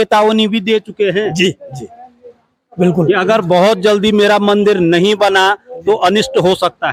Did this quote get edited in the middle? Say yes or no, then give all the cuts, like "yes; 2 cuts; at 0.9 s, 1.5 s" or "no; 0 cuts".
no; 0 cuts